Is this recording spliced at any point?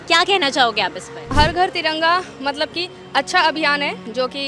yes; 1 cut; at 1.3 s

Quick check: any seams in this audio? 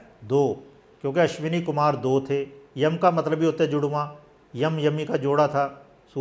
no; 0 cuts

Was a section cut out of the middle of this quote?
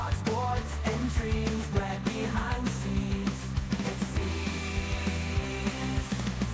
no; 0 cuts

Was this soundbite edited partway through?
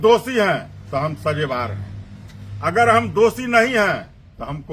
no; 0 cuts

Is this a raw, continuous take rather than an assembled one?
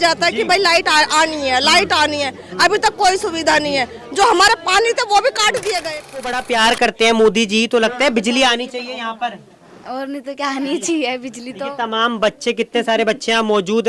no; 1 cut; at 6.2 s

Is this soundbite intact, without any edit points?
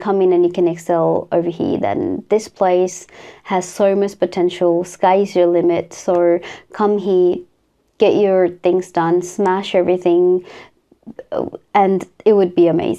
yes; 0 cuts

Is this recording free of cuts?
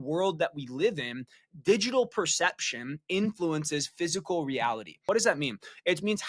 no; 1 cut; at 5.0 s

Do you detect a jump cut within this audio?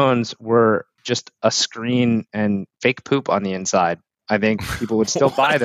yes; 2 cuts; at 1.0 s, 2.7 s

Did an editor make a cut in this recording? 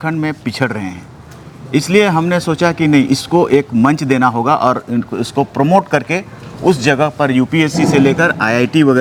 no; 0 cuts

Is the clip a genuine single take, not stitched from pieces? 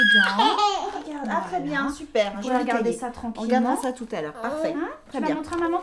no; 1 cut; at 4.9 s

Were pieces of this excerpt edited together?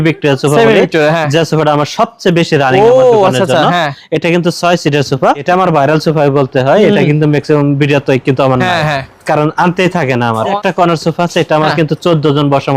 yes; 2 cuts; at 5.4 s, 10.5 s

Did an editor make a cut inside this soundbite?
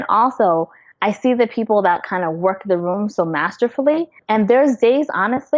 yes; 1 cut; at 4.4 s

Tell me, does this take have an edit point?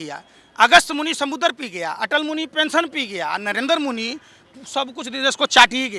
no; 0 cuts

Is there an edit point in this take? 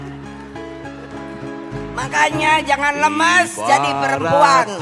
no; 0 cuts

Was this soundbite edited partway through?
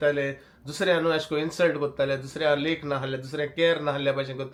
no; 0 cuts

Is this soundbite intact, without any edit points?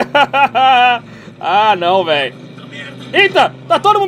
yes; 0 cuts

